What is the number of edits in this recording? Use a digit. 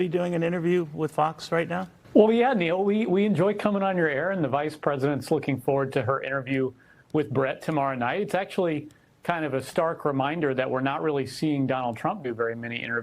1